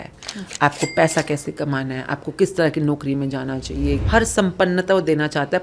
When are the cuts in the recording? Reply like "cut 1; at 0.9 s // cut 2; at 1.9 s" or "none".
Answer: cut 1; at 4.0 s